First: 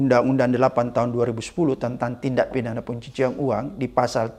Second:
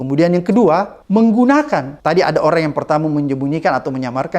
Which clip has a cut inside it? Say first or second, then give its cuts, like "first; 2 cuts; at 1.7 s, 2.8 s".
second; 2 cuts; at 1.0 s, 1.9 s